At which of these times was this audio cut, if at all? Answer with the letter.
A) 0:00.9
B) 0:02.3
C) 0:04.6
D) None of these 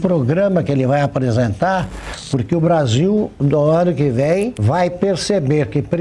C